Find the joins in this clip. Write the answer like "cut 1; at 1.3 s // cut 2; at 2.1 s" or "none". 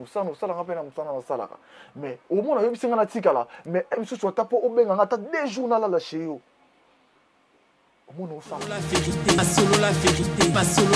cut 1; at 8.8 s